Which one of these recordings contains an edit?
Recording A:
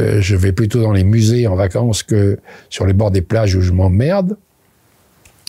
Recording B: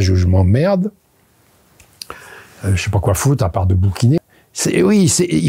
B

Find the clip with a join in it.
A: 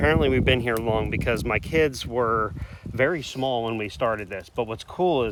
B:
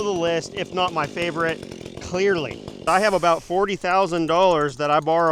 B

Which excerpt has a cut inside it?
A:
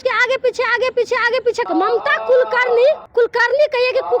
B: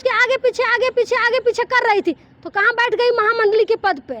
A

